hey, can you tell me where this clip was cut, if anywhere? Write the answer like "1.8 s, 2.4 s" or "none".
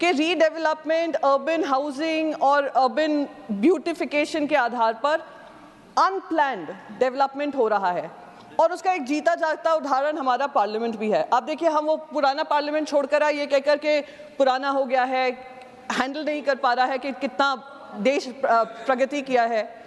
none